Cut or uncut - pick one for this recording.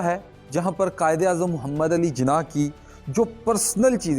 uncut